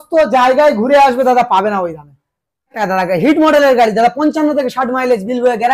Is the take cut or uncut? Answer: cut